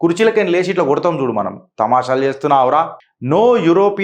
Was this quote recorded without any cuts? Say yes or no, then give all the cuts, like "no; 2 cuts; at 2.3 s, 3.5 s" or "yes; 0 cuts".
no; 1 cut; at 2.9 s